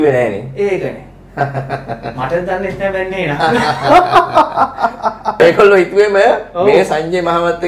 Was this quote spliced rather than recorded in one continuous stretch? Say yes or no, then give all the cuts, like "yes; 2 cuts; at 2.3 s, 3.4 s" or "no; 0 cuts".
yes; 1 cut; at 5.4 s